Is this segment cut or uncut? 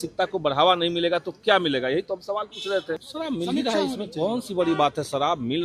cut